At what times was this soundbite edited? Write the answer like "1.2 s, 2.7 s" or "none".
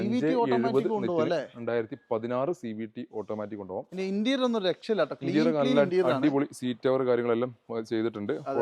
none